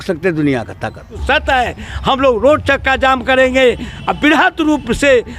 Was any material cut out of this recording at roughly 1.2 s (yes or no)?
yes